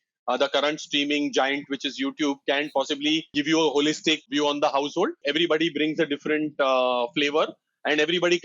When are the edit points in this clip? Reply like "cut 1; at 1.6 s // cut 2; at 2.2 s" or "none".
cut 1; at 3.3 s // cut 2; at 4.3 s // cut 3; at 5.2 s